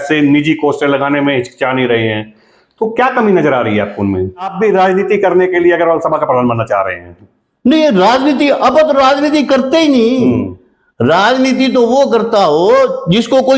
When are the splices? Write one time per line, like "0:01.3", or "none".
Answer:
0:04.5